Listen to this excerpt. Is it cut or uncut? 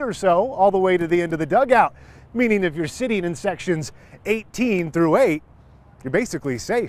uncut